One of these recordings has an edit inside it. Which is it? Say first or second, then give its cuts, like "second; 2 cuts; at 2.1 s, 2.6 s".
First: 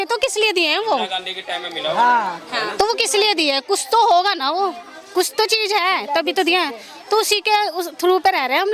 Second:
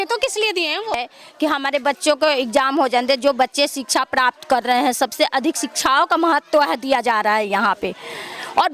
second; 1 cut; at 1.0 s